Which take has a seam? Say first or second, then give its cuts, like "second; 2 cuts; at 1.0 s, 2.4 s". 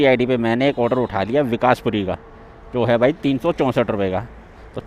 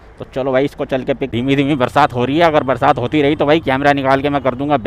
second; 1 cut; at 1.3 s